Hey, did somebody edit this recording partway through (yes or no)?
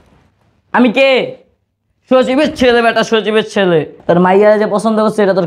no